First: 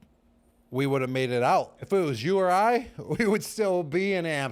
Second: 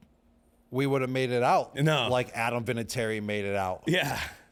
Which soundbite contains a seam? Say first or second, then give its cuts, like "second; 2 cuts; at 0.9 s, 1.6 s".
first; 1 cut; at 1.7 s